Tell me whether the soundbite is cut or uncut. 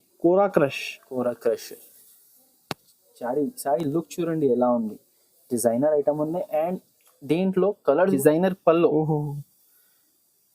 cut